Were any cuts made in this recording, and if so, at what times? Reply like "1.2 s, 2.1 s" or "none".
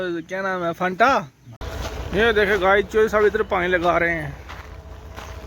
1.6 s